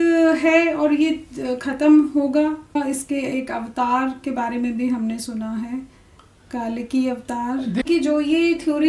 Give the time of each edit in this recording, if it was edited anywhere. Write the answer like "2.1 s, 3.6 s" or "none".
2.8 s, 7.8 s